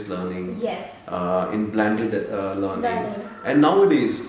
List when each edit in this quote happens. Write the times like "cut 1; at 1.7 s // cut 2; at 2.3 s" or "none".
none